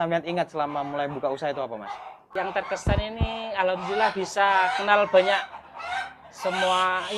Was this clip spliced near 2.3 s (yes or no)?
yes